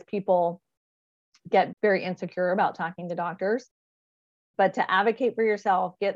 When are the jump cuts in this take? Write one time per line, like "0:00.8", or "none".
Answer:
0:01.7